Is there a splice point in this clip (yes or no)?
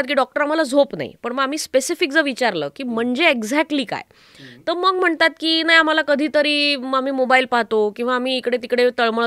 no